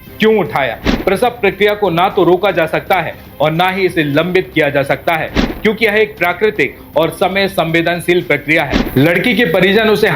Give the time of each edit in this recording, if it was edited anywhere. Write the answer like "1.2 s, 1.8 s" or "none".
0.9 s, 8.8 s